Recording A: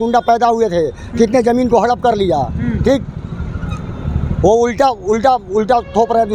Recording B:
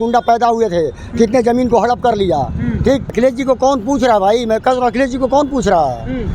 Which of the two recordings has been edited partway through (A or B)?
B